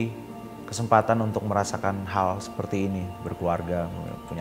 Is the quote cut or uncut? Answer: uncut